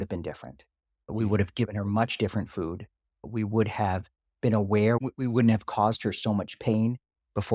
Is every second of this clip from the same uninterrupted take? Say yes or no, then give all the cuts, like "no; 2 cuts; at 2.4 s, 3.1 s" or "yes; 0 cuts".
no; 3 cuts; at 1.1 s, 3.3 s, 5.0 s